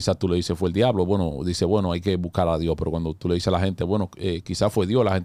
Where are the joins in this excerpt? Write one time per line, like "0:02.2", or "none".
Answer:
none